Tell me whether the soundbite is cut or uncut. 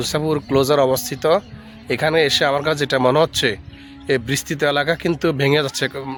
uncut